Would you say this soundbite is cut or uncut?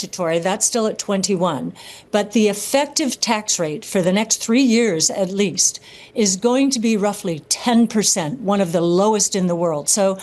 uncut